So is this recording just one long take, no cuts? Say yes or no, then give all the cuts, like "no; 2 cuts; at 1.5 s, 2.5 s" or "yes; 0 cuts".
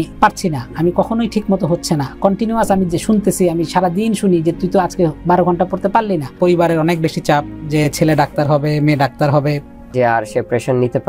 no; 2 cuts; at 6.3 s, 9.9 s